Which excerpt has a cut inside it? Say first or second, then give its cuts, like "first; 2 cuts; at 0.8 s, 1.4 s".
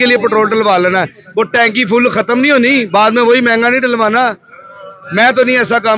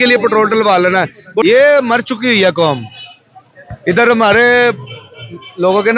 second; 1 cut; at 1.4 s